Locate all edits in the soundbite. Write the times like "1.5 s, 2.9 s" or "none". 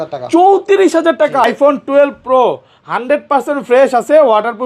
1.4 s

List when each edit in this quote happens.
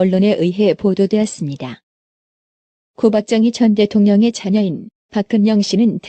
4.4 s

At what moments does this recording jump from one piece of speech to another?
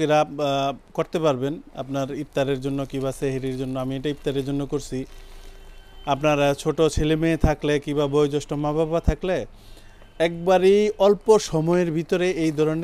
none

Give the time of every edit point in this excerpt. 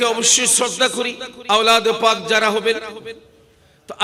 1.3 s

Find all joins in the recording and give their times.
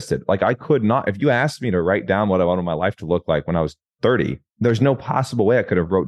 4.4 s

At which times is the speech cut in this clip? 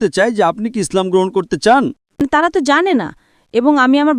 2.0 s

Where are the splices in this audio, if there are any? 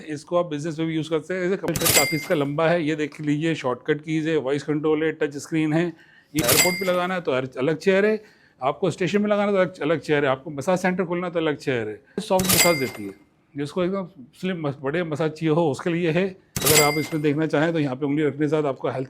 1.7 s, 6.4 s, 12.2 s, 16.5 s

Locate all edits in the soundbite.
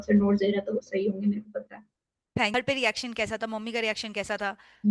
2.5 s

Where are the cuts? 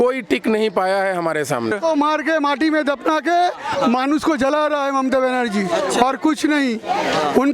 1.7 s

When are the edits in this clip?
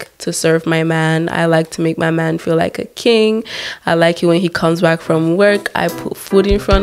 none

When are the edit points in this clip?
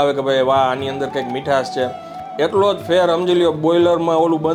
none

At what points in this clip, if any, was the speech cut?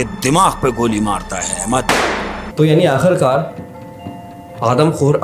1.9 s

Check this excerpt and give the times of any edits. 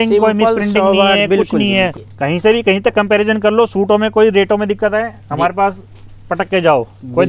2.1 s

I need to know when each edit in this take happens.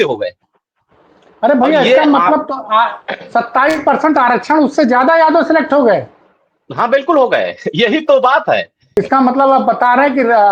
8.8 s

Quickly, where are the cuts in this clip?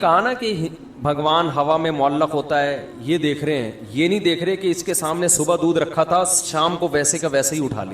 none

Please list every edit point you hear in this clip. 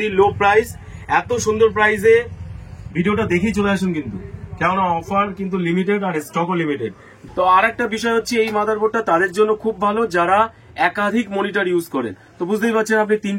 7.1 s

